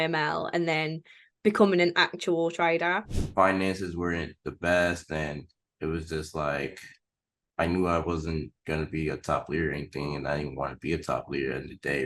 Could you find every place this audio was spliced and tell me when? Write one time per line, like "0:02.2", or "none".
0:03.2